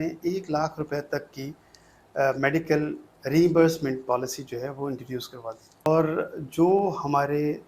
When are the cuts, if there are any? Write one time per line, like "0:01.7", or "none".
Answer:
0:05.9